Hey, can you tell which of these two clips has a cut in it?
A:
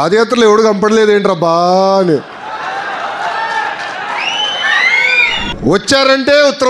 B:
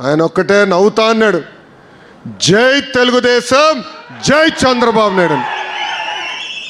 A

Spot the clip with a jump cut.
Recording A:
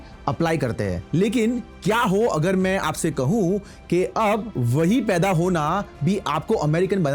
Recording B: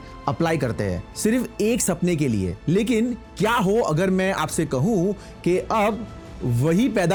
A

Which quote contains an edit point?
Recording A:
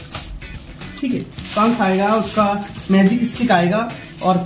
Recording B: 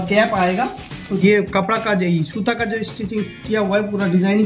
B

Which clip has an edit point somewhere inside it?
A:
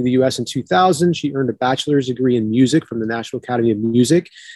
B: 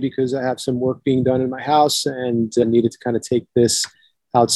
B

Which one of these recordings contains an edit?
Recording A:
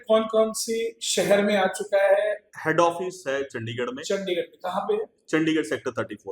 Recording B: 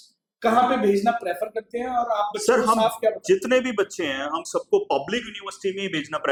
A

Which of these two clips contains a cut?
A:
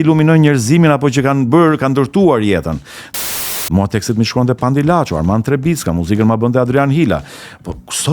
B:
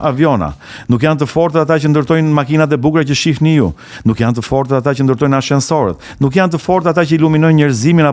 A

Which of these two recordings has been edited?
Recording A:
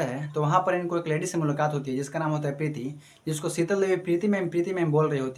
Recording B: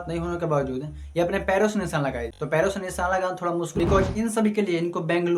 B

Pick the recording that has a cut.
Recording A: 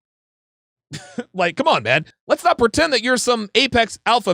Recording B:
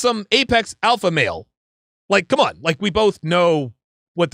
A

